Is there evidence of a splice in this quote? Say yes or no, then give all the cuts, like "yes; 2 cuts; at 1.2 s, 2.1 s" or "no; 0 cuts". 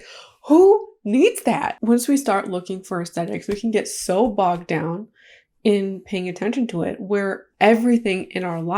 yes; 1 cut; at 1.7 s